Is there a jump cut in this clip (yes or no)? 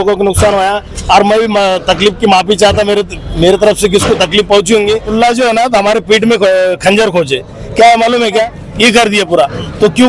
yes